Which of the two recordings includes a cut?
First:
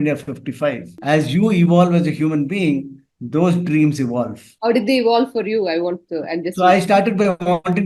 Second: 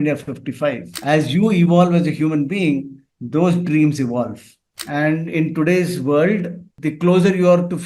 second; 1 cut; at 4.5 s

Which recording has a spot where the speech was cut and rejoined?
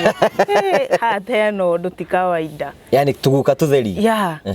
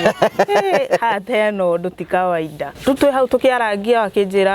second; 1 cut; at 2.6 s

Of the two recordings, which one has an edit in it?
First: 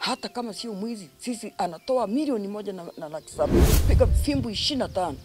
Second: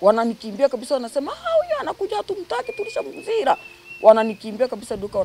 first; 1 cut; at 3.7 s

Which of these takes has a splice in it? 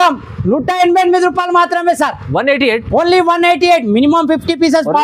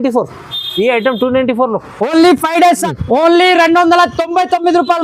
second; 1 cut; at 2.9 s

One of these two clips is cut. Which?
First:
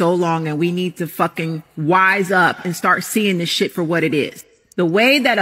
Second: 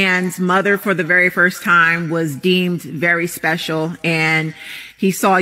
second; 1 cut; at 4.1 s

